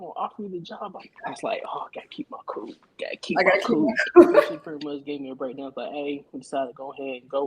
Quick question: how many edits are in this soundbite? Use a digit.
1